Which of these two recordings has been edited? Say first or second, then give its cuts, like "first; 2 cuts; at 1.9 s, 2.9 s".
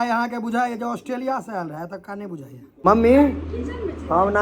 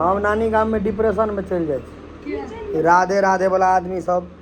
first; 1 cut; at 2.7 s